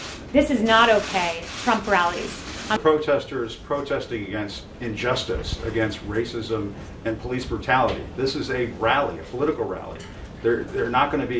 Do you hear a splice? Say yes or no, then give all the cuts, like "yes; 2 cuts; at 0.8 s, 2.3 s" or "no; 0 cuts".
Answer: yes; 1 cut; at 2.8 s